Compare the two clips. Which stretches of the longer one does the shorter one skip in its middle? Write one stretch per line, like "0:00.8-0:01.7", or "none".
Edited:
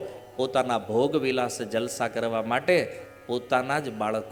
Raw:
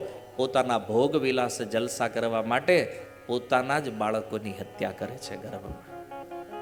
none